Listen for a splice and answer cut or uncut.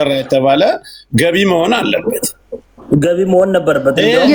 uncut